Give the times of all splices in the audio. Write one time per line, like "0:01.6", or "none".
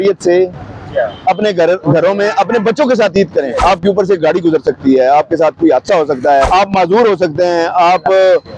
0:03.5
0:06.5